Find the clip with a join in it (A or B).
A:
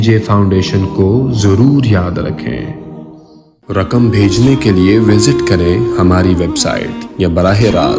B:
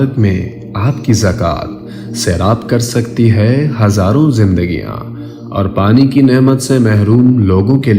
B